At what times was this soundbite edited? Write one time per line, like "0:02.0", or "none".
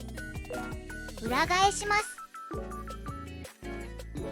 0:01.2
0:02.1